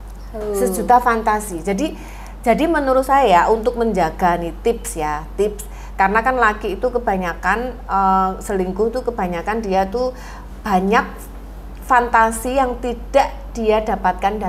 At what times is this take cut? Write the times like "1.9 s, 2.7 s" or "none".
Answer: none